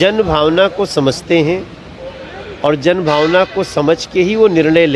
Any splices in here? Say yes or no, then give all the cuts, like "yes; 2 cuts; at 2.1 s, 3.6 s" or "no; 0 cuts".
no; 0 cuts